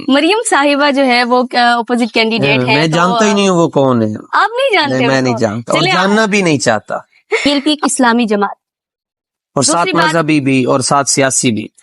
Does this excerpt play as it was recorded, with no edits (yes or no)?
no